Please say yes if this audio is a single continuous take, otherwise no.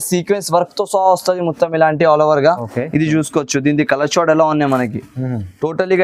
yes